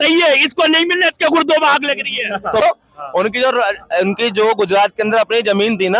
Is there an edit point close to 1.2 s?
no; 1 cut; at 2.6 s

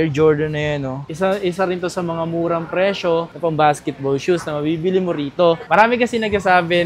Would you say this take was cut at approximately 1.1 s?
yes; 2 cuts; at 1.1 s, 5.6 s

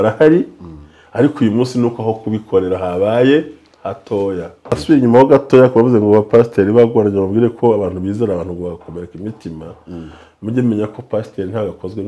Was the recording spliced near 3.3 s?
no; 1 cut; at 4.7 s

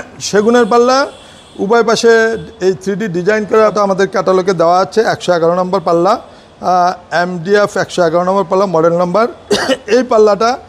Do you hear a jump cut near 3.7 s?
yes; 1 cut; at 3.7 s

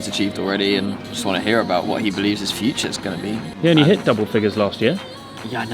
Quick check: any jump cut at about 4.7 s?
no; 2 cuts; at 1.9 s, 3.5 s

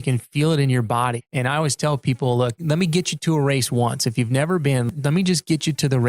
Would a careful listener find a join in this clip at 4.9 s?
yes; 3 cuts; at 1.2 s, 2.6 s, 4.9 s

